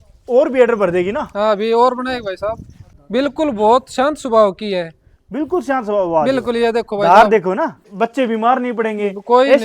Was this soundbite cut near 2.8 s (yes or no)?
yes